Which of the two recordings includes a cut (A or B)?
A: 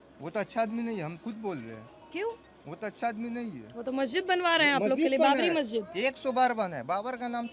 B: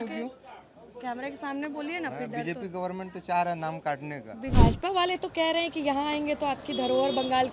B